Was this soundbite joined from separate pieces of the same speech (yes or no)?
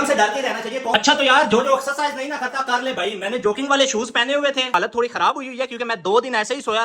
yes